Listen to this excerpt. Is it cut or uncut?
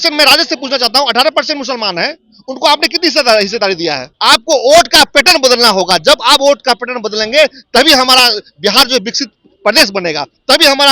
cut